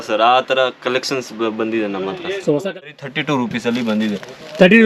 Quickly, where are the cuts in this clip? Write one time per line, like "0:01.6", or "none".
0:02.9